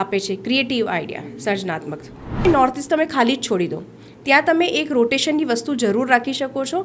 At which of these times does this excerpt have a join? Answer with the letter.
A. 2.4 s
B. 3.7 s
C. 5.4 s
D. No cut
A